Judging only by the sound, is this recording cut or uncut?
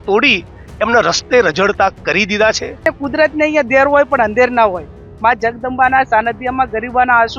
cut